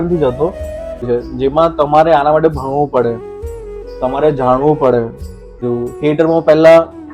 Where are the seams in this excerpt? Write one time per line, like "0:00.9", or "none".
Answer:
0:01.0
0:05.6